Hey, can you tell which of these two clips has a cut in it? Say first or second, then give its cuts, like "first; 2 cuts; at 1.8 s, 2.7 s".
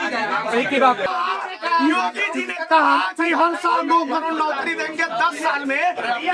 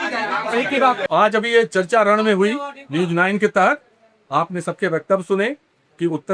first; 1 cut; at 1.1 s